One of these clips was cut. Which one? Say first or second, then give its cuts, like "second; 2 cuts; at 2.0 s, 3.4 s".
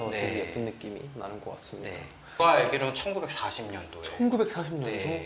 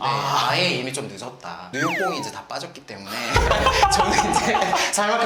first; 1 cut; at 2.3 s